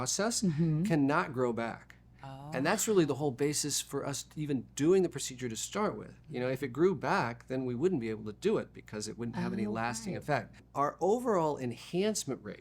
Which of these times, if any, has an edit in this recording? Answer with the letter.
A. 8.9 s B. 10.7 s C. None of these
B